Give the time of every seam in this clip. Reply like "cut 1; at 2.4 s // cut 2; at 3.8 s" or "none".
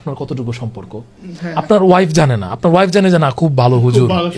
none